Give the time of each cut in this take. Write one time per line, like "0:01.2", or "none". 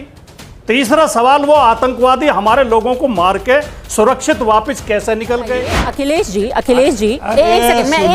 0:05.9